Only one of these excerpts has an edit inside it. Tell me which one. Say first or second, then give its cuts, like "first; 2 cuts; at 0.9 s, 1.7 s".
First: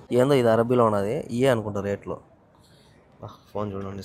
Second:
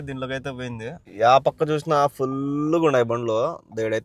second; 1 cut; at 1.0 s